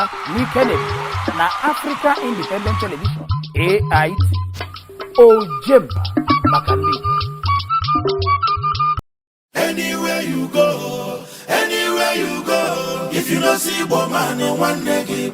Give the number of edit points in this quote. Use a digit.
2